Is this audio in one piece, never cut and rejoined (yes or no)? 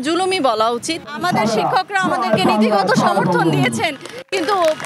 no